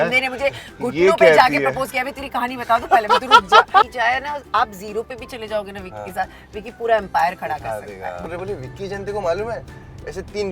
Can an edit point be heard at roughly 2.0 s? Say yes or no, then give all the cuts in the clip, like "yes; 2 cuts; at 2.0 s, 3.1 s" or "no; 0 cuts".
no; 2 cuts; at 3.9 s, 8.2 s